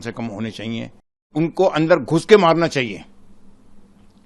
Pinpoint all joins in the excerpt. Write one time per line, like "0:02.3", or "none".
0:01.3